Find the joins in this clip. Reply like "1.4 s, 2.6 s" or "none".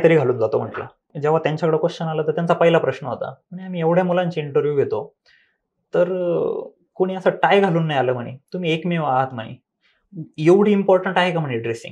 1.0 s